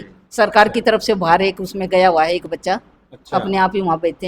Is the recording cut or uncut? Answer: uncut